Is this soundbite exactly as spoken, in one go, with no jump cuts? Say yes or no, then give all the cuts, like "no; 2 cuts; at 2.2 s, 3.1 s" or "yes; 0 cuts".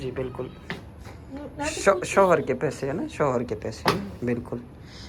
yes; 0 cuts